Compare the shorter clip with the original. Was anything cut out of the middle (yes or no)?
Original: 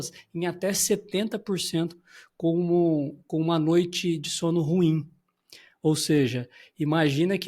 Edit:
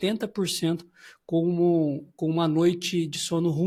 no